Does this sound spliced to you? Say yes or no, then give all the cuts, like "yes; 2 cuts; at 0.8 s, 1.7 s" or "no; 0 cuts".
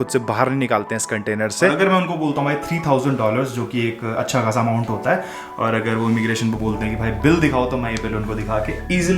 yes; 1 cut; at 1.7 s